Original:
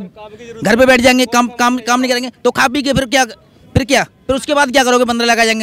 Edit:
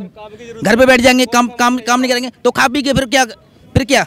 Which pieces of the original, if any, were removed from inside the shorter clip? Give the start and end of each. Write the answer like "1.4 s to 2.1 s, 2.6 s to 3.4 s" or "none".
none